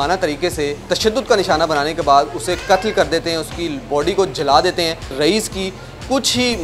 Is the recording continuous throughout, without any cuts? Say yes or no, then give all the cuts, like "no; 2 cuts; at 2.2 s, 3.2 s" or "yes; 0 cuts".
no; 2 cuts; at 0.8 s, 5.2 s